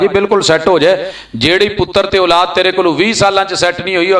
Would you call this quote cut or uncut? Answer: uncut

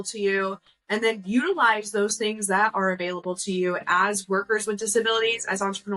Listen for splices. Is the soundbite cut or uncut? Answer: uncut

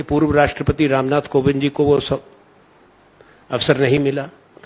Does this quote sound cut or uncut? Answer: uncut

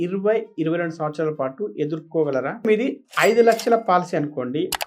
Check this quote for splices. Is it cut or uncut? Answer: cut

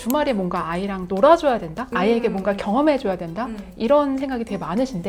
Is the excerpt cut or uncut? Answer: uncut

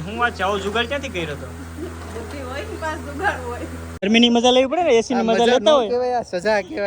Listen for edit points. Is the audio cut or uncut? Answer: cut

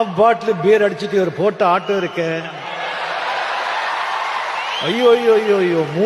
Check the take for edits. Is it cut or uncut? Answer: uncut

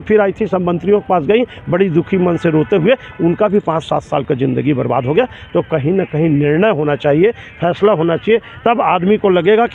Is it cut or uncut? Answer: uncut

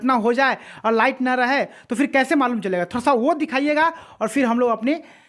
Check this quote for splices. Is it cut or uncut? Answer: uncut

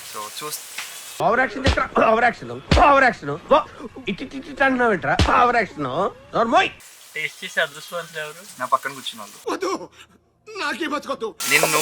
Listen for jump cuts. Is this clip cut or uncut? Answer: cut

